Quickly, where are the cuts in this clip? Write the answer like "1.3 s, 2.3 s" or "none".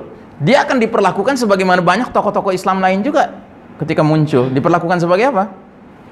none